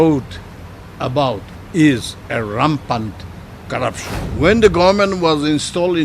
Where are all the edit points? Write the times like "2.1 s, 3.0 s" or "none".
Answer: 1.5 s, 4.1 s